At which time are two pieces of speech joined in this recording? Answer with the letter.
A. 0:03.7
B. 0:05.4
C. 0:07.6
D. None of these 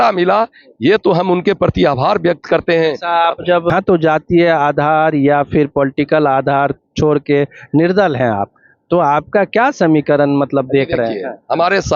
A